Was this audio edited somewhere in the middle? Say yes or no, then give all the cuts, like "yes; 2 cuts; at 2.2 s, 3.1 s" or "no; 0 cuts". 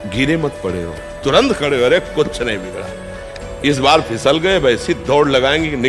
no; 0 cuts